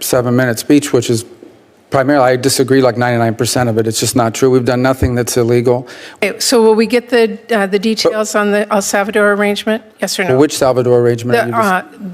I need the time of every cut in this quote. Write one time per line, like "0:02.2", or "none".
0:06.2